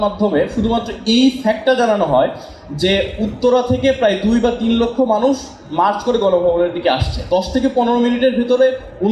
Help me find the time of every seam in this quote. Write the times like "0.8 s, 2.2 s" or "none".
7.2 s